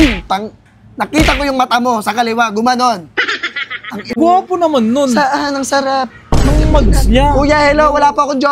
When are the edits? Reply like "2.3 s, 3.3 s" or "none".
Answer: 4.2 s

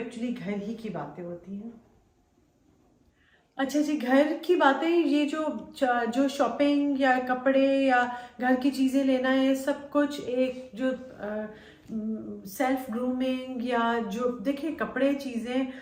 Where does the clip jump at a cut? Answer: none

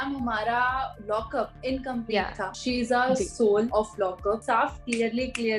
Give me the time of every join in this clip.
1.2 s, 2.6 s, 4.2 s

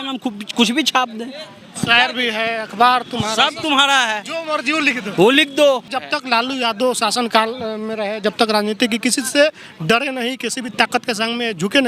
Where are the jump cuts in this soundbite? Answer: 5.9 s

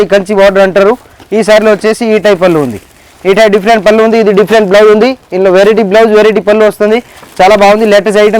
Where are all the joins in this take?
none

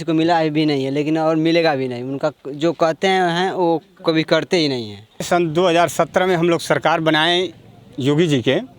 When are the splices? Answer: 5.2 s

